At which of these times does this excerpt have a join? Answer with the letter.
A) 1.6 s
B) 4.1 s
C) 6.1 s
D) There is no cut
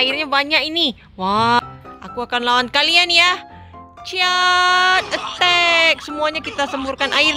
A